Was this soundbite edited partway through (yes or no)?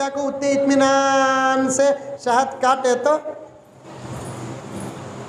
no